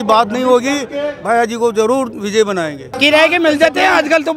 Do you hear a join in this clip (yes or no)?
yes